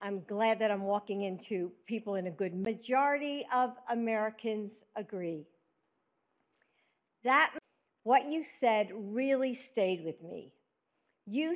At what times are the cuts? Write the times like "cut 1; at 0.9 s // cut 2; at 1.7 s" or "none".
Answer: none